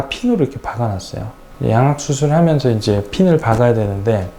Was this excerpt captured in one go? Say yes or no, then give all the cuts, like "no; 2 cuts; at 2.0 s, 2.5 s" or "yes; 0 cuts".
yes; 0 cuts